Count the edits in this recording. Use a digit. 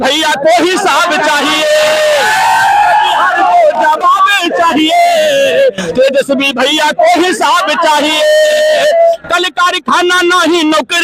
0